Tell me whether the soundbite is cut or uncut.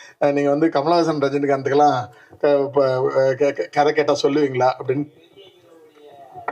uncut